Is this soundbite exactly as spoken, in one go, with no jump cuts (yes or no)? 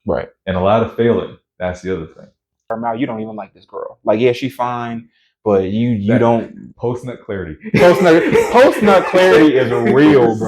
no